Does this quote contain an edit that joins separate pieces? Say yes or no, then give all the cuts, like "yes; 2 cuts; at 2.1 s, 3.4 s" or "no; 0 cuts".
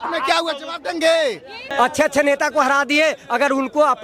yes; 1 cut; at 1.6 s